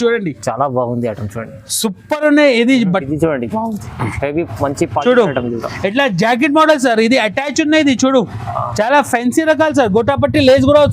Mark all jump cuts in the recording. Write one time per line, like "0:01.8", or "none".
0:03.1